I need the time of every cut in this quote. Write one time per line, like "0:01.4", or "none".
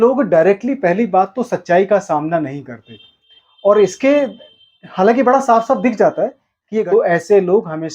0:06.7